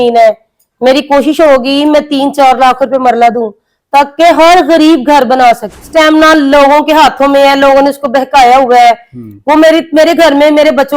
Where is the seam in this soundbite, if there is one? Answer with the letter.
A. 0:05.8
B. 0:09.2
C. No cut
A